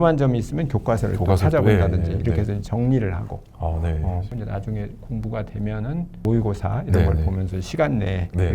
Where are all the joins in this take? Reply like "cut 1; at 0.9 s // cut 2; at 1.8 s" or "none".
cut 1; at 4.3 s // cut 2; at 6.2 s